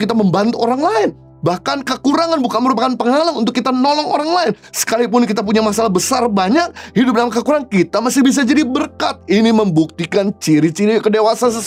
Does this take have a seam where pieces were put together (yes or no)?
no